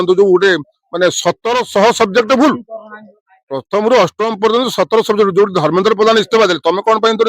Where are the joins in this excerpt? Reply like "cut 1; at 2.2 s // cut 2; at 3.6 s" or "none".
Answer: none